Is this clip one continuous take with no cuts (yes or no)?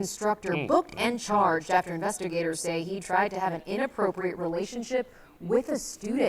no